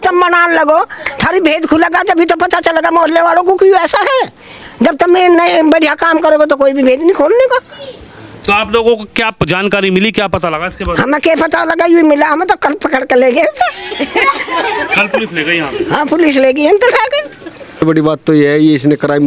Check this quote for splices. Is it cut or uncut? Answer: cut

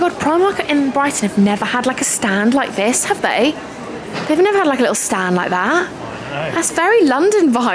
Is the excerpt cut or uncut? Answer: uncut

